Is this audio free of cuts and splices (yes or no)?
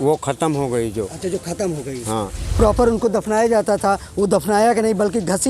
no